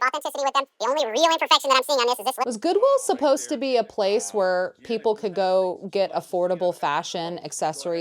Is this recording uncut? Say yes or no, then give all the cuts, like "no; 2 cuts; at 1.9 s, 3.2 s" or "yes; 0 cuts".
yes; 0 cuts